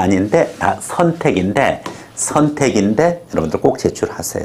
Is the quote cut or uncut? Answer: uncut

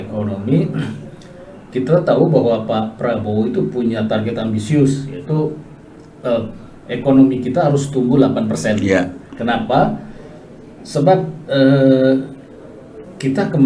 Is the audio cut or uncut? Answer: uncut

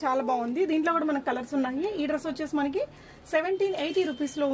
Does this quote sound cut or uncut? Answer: uncut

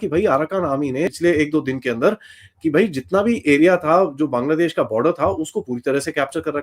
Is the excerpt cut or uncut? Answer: cut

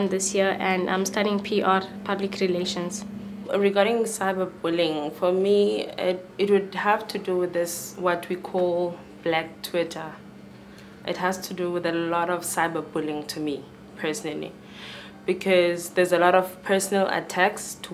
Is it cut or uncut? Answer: uncut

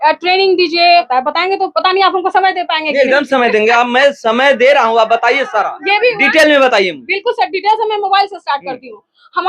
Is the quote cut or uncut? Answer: cut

